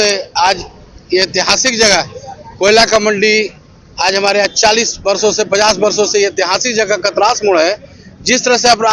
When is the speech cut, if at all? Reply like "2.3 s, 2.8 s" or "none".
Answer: none